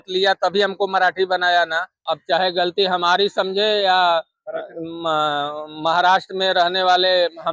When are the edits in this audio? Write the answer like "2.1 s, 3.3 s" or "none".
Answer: 1.9 s